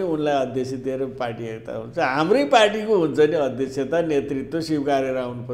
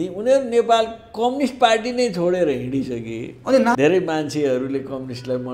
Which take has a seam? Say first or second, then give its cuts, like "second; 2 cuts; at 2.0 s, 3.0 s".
second; 1 cut; at 3.7 s